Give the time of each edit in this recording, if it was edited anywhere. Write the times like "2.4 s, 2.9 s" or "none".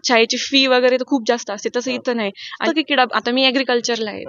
2.6 s